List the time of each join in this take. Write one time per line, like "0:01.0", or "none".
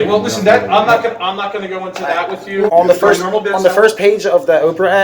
0:02.7